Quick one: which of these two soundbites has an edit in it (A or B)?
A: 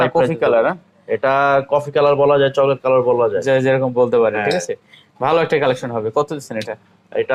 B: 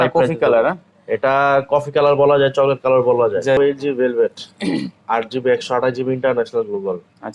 B